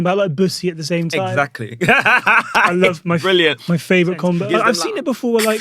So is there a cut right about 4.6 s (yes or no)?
yes